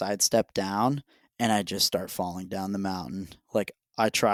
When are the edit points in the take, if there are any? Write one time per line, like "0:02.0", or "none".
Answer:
none